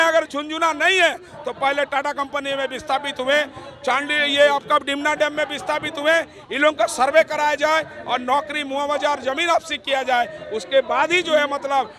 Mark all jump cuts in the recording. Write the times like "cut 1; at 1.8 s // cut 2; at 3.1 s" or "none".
none